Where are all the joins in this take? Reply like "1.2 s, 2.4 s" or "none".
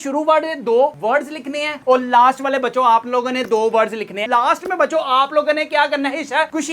4.2 s